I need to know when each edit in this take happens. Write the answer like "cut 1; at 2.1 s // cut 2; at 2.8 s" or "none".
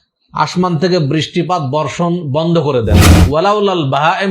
cut 1; at 3.2 s